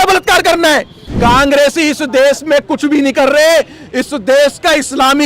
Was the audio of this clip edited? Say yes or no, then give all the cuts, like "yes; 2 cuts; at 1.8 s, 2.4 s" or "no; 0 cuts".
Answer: yes; 1 cut; at 1.0 s